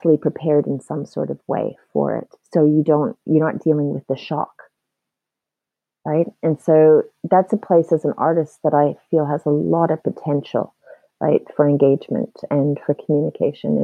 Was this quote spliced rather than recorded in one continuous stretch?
no; 0 cuts

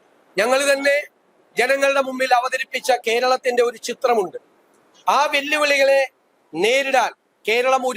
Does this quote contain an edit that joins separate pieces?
no; 0 cuts

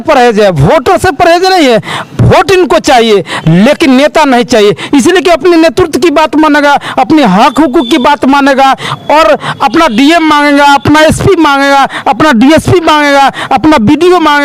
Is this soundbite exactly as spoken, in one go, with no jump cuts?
yes; 0 cuts

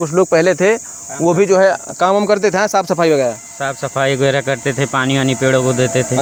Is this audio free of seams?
yes; 0 cuts

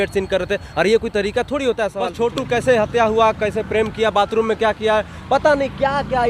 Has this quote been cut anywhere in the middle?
yes; 1 cut; at 2.2 s

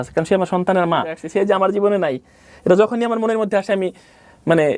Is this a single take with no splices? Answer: no; 1 cut; at 1.2 s

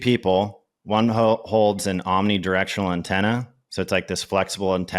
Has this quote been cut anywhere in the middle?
no; 0 cuts

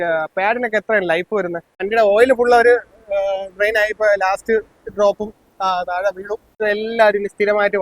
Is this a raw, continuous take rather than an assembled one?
no; 2 cuts; at 1.8 s, 6.6 s

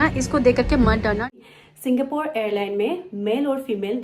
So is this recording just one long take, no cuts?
no; 1 cut; at 1.3 s

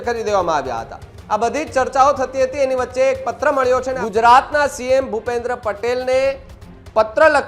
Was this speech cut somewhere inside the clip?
yes; 2 cuts; at 1.1 s, 4.0 s

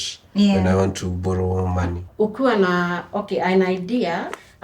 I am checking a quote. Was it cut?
yes; 1 cut; at 2.0 s

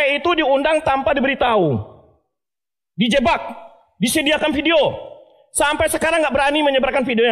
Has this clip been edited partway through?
no; 0 cuts

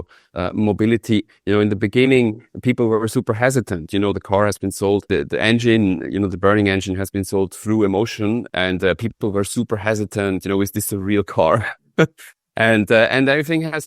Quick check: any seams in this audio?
yes; 2 cuts; at 5.0 s, 8.5 s

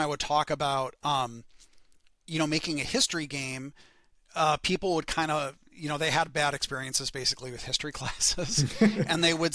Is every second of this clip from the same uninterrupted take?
yes; 0 cuts

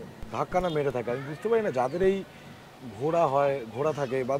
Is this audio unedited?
yes; 0 cuts

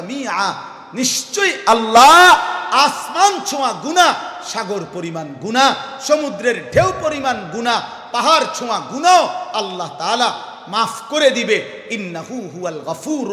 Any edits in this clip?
no; 0 cuts

